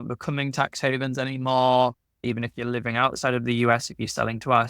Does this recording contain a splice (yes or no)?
yes